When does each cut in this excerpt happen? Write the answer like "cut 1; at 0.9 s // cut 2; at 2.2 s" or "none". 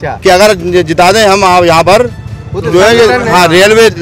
none